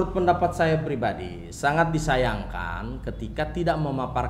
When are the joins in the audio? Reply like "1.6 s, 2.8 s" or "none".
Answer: none